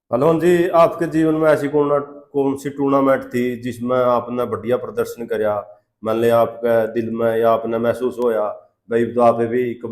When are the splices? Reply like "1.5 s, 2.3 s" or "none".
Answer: none